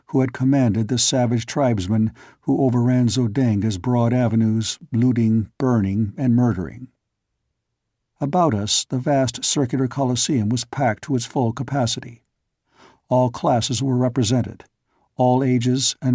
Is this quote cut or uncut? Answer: uncut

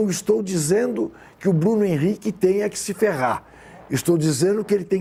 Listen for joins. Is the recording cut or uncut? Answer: uncut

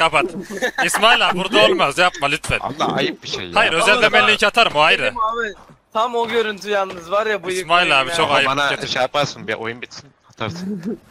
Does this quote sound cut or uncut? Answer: uncut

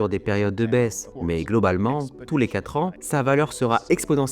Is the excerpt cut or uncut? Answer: cut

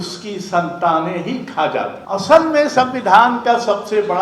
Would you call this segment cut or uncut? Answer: cut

